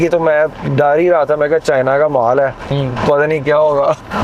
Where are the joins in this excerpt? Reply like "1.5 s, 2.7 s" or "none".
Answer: none